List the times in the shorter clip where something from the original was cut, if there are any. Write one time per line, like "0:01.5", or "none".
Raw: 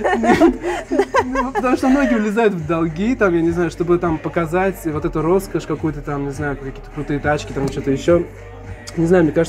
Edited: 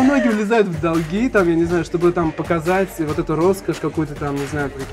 none